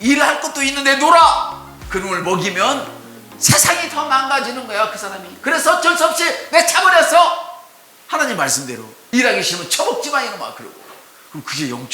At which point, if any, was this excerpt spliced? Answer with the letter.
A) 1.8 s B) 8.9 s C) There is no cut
B